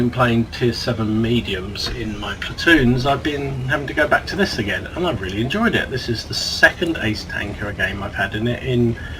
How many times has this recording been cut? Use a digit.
1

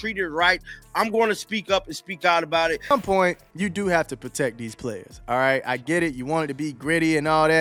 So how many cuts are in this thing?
0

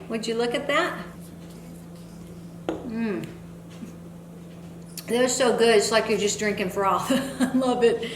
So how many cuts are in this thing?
1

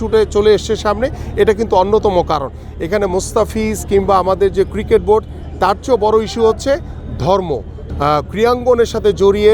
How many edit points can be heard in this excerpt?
1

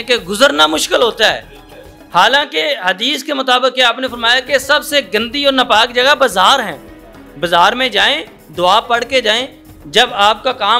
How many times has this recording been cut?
0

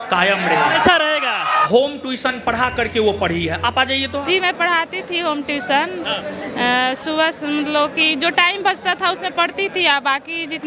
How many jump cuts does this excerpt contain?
2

